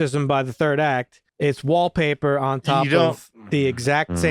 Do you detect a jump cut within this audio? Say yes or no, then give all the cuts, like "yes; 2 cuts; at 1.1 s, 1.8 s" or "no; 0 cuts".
yes; 1 cut; at 1.2 s